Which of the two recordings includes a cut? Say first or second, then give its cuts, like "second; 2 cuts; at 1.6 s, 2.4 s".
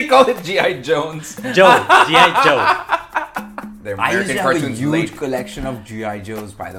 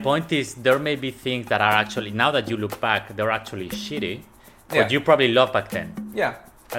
first; 1 cut; at 3.6 s